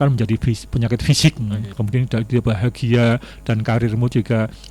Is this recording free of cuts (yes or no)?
no